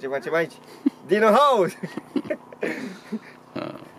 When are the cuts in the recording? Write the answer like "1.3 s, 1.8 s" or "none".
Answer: none